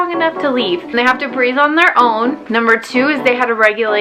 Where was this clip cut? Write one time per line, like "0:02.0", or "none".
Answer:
0:02.4